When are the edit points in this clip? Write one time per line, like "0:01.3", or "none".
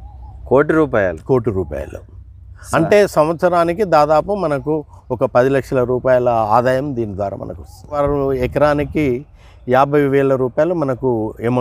0:08.0